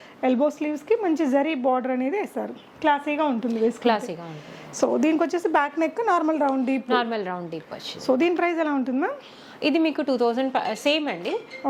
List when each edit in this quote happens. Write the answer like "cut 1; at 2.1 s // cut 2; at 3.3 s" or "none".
none

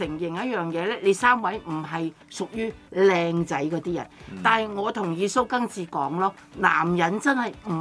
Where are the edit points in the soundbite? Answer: none

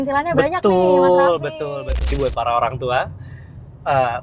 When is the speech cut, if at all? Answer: cut 1; at 1.7 s

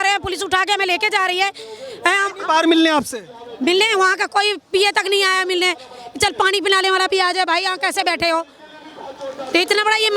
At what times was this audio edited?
none

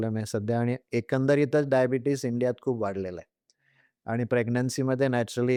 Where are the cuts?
none

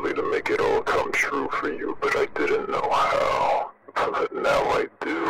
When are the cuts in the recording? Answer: cut 1; at 3.8 s

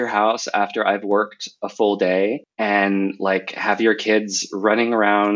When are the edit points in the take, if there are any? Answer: cut 1; at 2.5 s

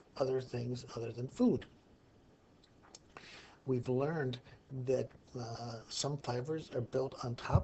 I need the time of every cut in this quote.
none

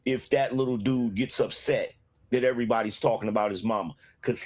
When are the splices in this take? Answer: none

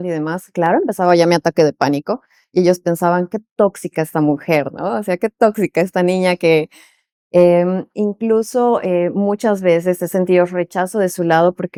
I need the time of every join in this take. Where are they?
none

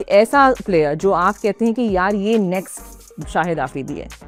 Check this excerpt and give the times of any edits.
none

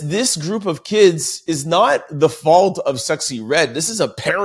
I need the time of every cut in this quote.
none

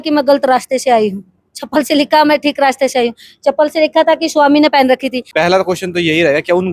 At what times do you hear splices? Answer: cut 1; at 5.2 s

